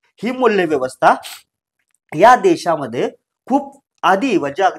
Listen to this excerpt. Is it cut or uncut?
uncut